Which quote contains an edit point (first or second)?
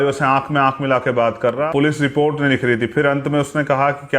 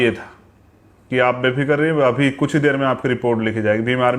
first